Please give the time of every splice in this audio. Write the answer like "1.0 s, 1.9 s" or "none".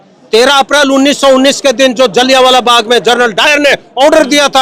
none